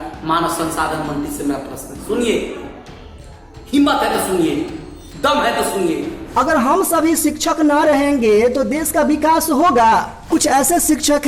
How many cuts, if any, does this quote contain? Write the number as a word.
two